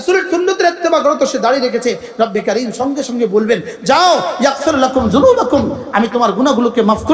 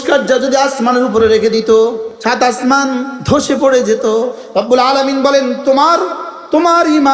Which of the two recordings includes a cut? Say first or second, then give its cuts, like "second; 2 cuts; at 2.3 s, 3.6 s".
second; 3 cuts; at 2.1 s, 3.2 s, 4.4 s